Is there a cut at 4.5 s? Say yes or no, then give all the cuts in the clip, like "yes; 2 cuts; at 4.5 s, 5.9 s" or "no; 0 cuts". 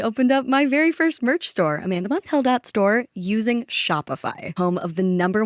yes; 1 cut; at 4.5 s